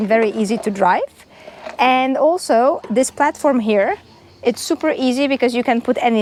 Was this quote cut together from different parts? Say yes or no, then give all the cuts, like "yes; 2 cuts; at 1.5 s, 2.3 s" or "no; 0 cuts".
no; 0 cuts